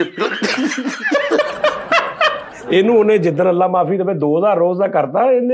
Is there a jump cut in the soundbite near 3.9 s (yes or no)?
no